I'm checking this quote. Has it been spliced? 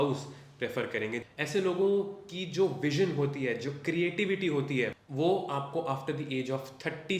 yes; 2 cuts; at 1.2 s, 5.0 s

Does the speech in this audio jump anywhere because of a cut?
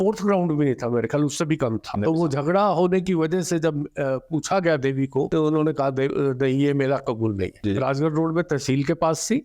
yes; 3 cuts; at 2.0 s, 5.3 s, 7.6 s

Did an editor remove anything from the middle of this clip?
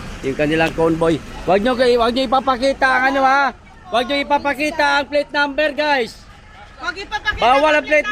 no; 0 cuts

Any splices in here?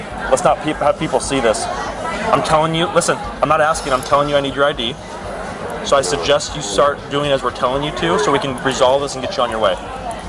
no; 0 cuts

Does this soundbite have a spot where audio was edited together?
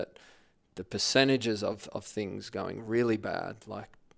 no; 0 cuts

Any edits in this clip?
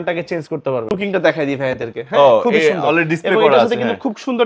yes; 1 cut; at 0.9 s

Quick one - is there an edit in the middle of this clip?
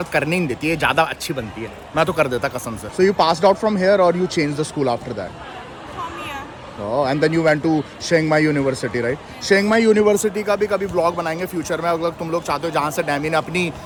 no; 0 cuts

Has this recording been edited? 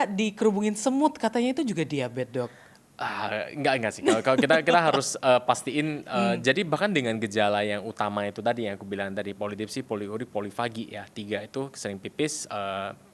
no; 0 cuts

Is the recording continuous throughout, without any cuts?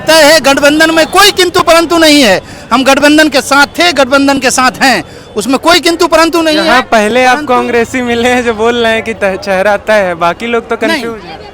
yes; 0 cuts

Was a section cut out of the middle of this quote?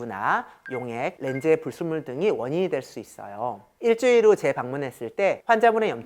yes; 1 cut; at 3.7 s

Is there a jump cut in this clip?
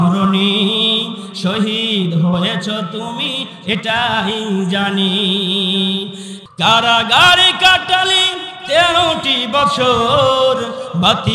yes; 1 cut; at 6.3 s

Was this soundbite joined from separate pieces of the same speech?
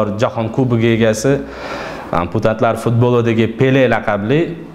no; 0 cuts

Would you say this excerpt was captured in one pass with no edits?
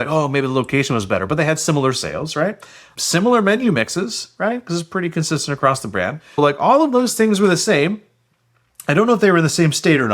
no; 1 cut; at 6.4 s

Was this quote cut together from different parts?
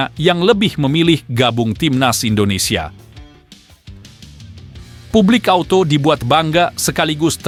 no; 0 cuts

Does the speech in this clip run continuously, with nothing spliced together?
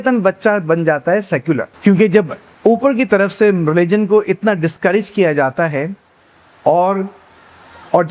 yes; 0 cuts

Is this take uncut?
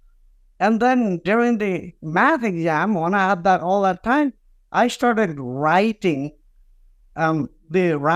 yes; 0 cuts

